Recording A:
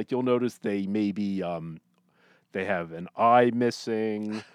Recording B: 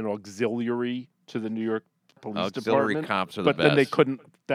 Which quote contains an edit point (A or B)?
B